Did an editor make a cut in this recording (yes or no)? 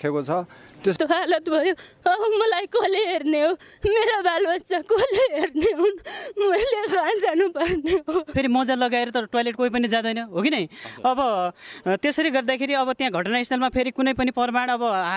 yes